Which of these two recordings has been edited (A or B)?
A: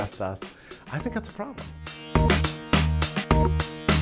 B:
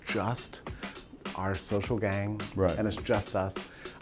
A